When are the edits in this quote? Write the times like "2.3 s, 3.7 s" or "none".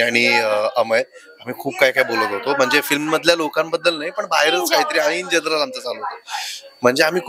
none